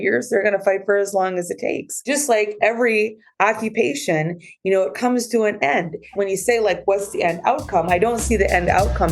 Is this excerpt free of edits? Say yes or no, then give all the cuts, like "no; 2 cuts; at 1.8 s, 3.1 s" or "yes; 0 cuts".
no; 2 cuts; at 1.9 s, 6.1 s